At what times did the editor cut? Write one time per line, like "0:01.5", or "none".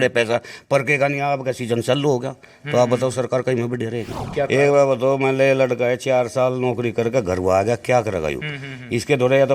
0:04.2